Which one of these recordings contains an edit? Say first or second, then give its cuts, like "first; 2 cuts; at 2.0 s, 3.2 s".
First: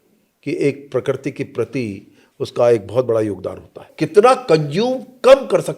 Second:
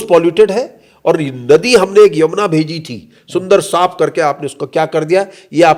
first; 1 cut; at 3.9 s